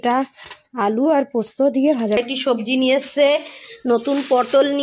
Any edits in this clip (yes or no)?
yes